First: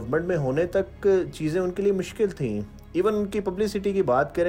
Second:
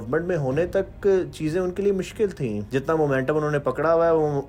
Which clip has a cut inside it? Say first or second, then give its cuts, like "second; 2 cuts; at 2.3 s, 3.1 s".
second; 1 cut; at 2.6 s